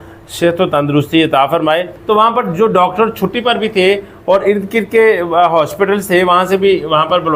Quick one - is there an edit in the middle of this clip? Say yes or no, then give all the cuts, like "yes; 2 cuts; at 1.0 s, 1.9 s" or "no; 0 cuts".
yes; 1 cut; at 1.9 s